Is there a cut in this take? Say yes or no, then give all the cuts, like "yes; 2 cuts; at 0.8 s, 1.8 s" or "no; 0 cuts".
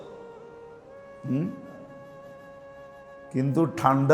yes; 2 cuts; at 1.9 s, 3.3 s